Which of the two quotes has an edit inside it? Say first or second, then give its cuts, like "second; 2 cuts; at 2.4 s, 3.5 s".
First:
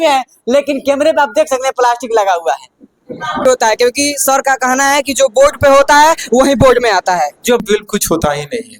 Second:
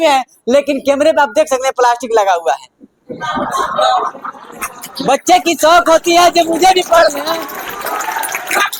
first; 2 cuts; at 3.4 s, 7.6 s